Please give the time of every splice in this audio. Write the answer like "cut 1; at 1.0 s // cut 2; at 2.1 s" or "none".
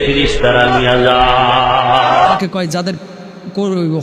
cut 1; at 2.4 s